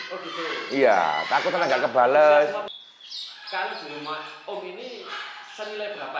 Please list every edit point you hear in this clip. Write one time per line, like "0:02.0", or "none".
0:02.7

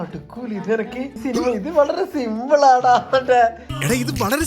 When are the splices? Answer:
0:01.2

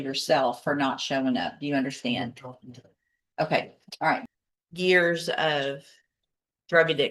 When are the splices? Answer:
0:04.3

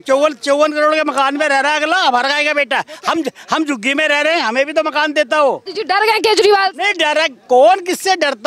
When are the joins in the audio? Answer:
0:05.7

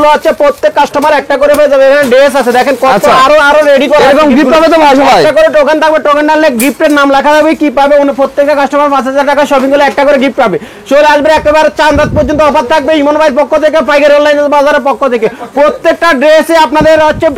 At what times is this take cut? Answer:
none

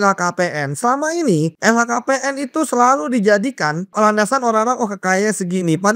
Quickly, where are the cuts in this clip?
0:01.5
0:03.9

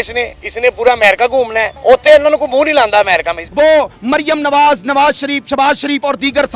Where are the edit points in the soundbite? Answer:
0:01.7
0:03.4

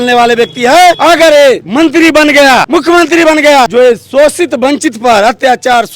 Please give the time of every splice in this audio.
0:01.0
0:01.6
0:02.7
0:03.7

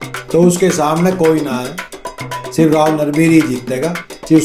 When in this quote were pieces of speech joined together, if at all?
none

